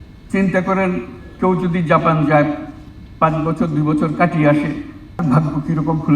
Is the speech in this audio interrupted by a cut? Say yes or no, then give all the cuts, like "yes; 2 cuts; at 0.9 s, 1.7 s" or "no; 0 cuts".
yes; 1 cut; at 5.2 s